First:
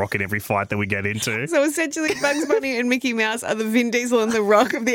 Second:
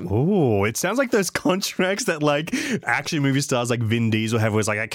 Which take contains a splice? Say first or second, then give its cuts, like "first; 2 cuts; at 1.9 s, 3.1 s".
first; 1 cut; at 1.4 s